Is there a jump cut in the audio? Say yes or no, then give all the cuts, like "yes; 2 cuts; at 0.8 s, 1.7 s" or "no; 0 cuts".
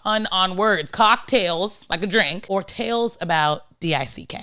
yes; 2 cuts; at 0.9 s, 2.4 s